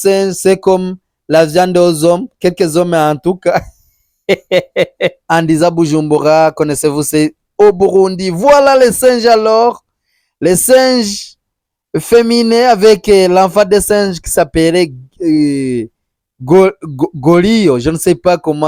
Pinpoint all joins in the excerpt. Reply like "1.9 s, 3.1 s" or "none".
5.2 s